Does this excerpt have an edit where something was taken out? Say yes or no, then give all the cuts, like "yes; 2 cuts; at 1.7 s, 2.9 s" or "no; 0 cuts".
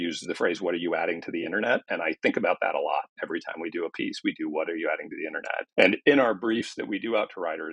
no; 0 cuts